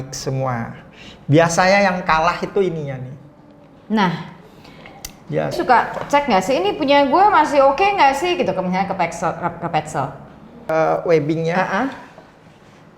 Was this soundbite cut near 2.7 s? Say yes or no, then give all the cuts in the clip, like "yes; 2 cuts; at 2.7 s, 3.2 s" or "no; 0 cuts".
no; 2 cuts; at 5.5 s, 10.7 s